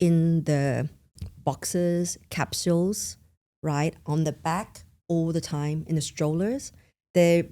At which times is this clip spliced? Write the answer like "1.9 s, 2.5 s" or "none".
none